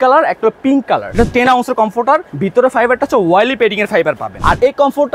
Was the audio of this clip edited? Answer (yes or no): yes